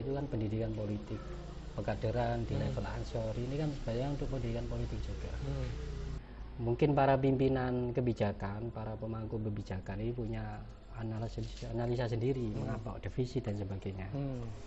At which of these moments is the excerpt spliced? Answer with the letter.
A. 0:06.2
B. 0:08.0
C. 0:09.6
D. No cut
A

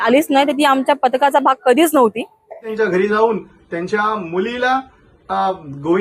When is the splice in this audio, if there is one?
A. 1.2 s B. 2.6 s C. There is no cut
B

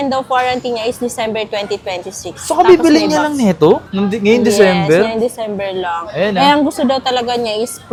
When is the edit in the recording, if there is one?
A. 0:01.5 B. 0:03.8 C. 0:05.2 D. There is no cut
D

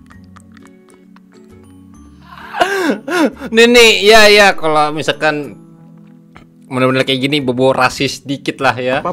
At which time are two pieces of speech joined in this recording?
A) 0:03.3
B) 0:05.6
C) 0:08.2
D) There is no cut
D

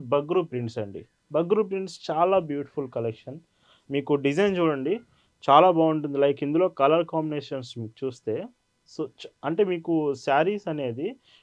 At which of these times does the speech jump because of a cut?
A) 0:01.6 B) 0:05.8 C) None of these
C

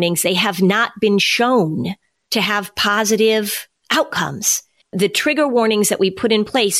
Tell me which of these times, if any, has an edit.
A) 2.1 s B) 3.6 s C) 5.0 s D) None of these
D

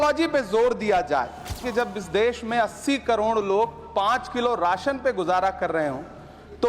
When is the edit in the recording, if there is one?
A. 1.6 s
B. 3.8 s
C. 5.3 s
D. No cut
A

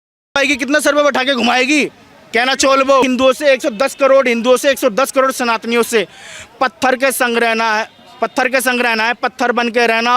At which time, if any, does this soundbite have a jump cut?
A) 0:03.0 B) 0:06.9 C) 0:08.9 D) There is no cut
A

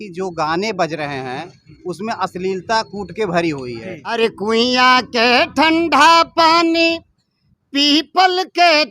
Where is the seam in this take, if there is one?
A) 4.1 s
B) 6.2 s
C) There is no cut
A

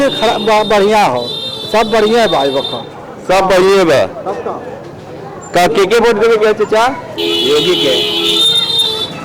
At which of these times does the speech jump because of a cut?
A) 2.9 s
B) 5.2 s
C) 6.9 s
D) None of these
D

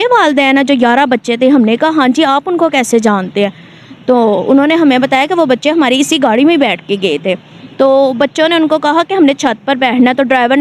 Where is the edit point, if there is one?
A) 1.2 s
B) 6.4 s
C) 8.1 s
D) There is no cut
D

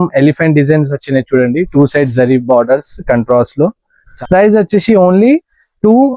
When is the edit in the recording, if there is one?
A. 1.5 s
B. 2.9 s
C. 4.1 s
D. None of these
C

